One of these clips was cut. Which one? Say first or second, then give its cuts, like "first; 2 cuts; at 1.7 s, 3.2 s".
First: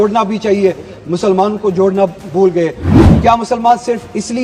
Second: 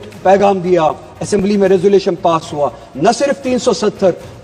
first; 1 cut; at 2.9 s